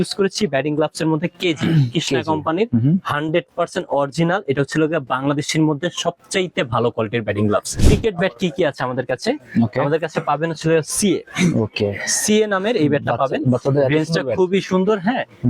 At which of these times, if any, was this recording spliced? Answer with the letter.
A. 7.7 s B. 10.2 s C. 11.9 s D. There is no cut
A